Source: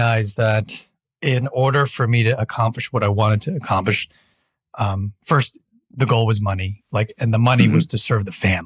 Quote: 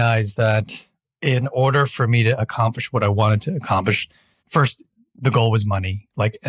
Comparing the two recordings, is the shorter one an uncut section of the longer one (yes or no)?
no